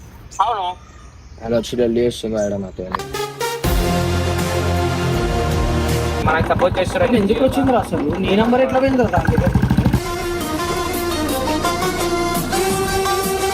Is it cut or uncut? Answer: cut